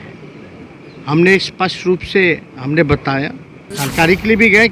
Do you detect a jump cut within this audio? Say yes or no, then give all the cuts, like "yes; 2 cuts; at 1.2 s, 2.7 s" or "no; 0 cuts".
yes; 1 cut; at 3.7 s